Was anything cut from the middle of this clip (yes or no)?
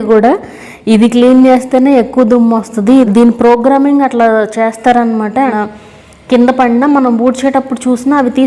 yes